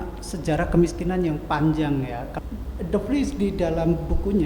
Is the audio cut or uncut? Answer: cut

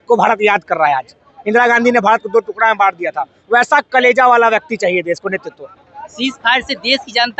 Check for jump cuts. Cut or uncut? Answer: uncut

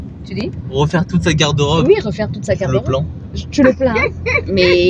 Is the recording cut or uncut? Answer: uncut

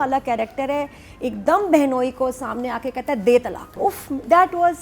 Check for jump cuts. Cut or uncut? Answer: cut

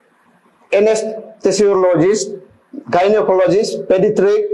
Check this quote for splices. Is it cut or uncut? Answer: uncut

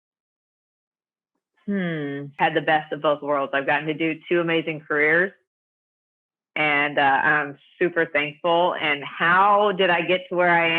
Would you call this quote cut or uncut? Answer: cut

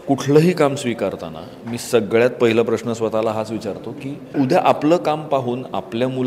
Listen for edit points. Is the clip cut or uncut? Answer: cut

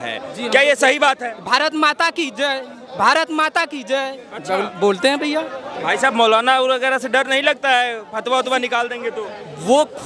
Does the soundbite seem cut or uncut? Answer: uncut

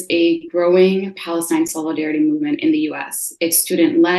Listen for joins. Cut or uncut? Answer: uncut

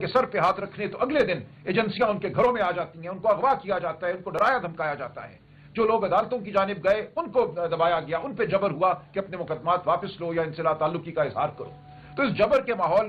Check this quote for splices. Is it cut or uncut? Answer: uncut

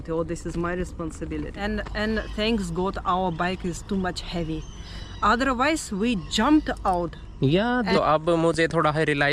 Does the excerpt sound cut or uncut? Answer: cut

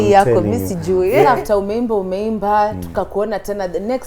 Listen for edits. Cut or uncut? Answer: uncut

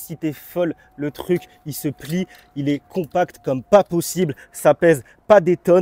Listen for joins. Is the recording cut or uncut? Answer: uncut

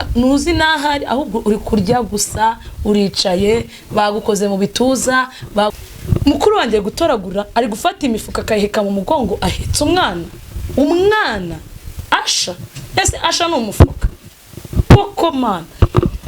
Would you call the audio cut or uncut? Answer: cut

